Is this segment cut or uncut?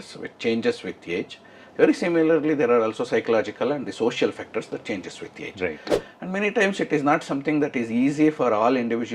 cut